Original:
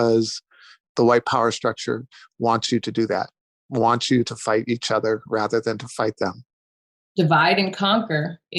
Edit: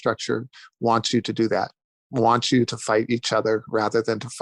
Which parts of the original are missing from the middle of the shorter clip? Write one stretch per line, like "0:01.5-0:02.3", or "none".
none